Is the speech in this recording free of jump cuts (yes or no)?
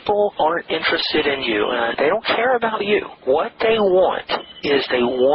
no